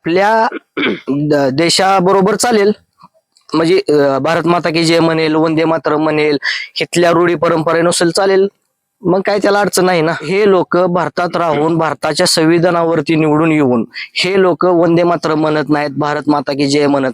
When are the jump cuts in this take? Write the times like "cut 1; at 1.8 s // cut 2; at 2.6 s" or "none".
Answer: cut 1; at 10.3 s